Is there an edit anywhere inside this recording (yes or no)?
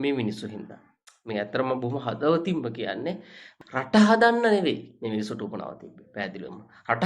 yes